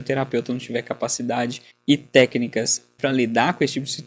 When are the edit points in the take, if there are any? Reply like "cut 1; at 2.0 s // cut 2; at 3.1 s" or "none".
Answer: cut 1; at 1.7 s // cut 2; at 2.9 s